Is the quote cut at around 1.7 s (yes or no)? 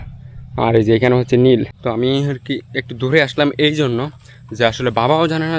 yes